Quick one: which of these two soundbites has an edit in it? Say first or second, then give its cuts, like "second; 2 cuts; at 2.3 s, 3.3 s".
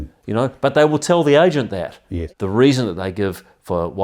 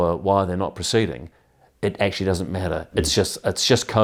first; 1 cut; at 2.1 s